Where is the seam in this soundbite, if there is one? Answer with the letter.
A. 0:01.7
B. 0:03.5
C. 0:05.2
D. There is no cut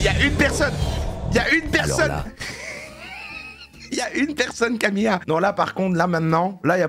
C